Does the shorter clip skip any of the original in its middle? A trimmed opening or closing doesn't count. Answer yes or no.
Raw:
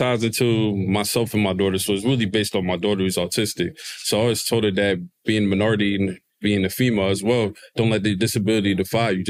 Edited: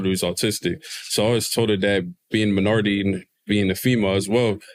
no